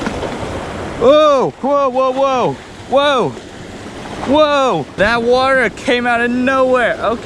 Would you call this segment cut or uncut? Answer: cut